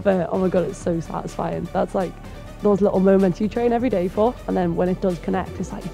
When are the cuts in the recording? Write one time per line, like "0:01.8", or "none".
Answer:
none